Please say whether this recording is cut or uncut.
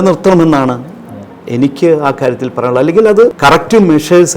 cut